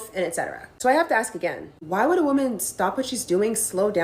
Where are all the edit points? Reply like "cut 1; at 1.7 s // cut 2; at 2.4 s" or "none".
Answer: cut 1; at 1.0 s